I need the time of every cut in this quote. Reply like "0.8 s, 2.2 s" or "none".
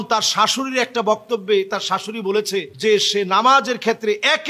none